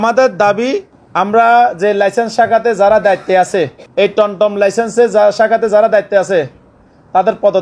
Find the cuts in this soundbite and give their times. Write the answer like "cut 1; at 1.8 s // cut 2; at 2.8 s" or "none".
cut 1; at 1.0 s // cut 2; at 3.8 s